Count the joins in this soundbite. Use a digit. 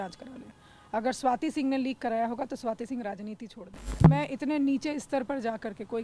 1